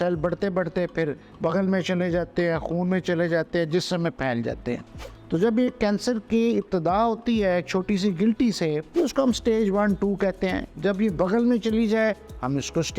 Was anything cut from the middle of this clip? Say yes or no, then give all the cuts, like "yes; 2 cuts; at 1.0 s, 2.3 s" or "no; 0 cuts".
yes; 1 cut; at 8.8 s